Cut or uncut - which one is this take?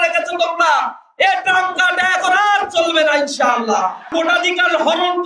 cut